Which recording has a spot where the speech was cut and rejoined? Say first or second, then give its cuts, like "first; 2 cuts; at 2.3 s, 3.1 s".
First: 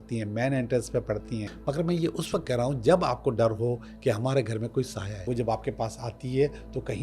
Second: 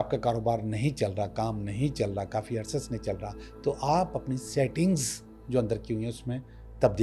first; 2 cuts; at 1.5 s, 5.3 s